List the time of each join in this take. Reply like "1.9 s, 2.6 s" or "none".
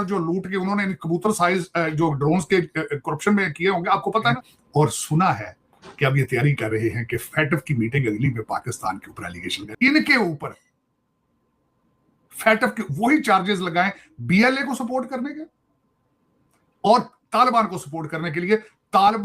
4.5 s, 9.6 s